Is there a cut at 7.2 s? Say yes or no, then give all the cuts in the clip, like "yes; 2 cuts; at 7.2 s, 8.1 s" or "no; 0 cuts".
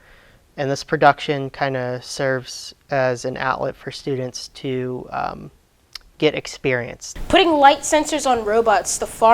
yes; 1 cut; at 7.2 s